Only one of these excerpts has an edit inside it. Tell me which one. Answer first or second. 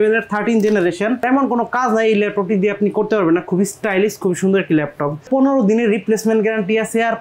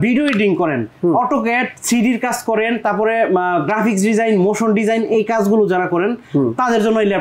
first